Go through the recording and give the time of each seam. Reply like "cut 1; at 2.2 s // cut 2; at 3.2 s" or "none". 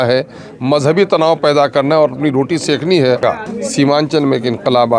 cut 1; at 3.4 s